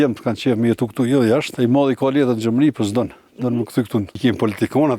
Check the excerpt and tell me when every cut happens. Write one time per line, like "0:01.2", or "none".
0:01.5
0:04.1